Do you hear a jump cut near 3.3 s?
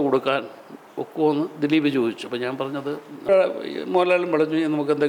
yes; 1 cut; at 3.3 s

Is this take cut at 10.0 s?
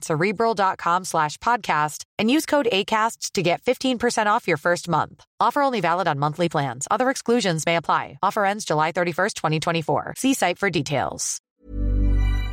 no; 1 cut; at 11.5 s

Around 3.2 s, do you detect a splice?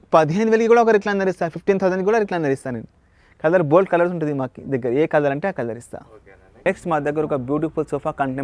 no; 0 cuts

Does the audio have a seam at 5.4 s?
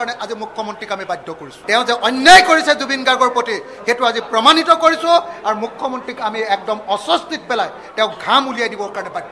no; 1 cut; at 1.5 s

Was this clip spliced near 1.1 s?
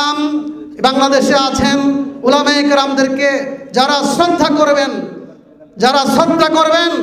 no; 0 cuts

